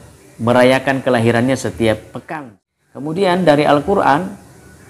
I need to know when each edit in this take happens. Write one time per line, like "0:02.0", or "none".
0:02.2